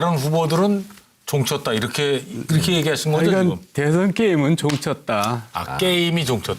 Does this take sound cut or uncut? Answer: cut